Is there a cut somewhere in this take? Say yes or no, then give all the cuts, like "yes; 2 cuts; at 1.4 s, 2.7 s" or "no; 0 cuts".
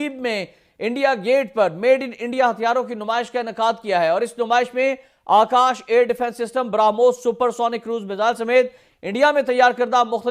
no; 0 cuts